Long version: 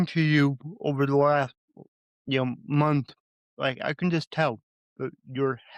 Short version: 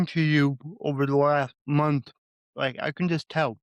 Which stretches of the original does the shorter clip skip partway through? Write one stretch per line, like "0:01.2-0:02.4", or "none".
0:01.6-0:02.6